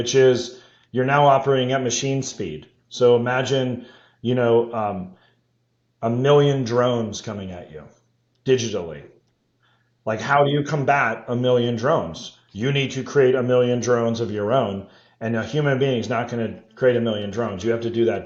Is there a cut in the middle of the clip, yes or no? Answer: no